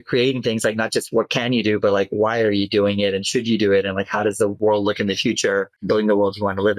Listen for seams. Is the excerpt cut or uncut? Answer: cut